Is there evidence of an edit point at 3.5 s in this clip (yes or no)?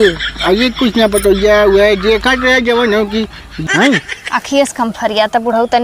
yes